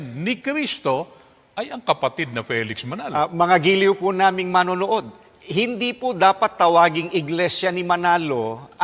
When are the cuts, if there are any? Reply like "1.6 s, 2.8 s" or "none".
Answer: 3.0 s